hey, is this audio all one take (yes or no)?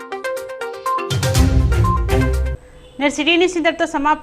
yes